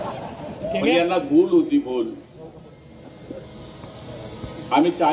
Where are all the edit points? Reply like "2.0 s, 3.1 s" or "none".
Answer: none